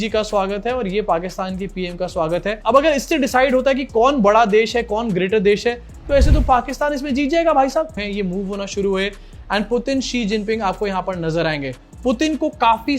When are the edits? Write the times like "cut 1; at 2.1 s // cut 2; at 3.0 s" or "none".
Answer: cut 1; at 7.9 s

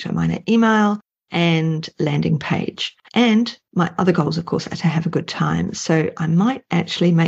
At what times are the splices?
none

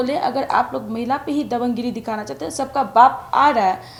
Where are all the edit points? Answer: none

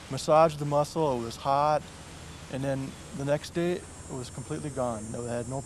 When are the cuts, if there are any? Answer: none

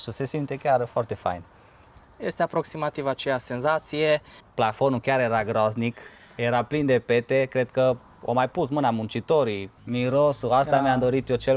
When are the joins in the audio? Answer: cut 1; at 4.3 s // cut 2; at 9.7 s

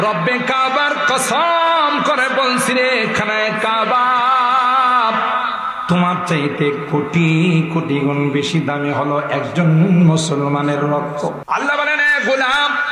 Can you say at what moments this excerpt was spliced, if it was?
cut 1; at 11.4 s

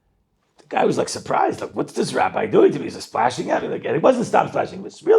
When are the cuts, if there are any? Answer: none

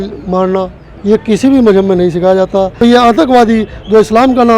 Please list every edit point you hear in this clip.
cut 1; at 2.7 s

